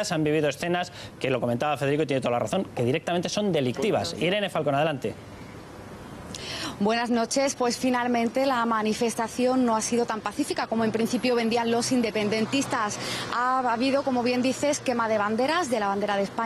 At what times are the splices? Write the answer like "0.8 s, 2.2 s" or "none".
none